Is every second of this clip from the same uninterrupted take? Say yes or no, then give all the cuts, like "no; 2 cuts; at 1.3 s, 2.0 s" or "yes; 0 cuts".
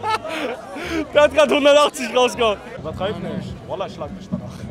no; 1 cut; at 2.6 s